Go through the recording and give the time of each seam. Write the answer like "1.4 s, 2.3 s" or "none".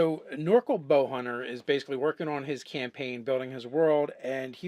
3.5 s